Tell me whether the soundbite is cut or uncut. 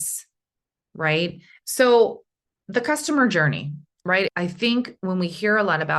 cut